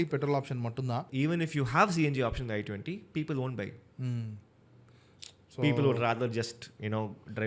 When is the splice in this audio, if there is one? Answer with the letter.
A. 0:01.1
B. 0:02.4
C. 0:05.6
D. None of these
A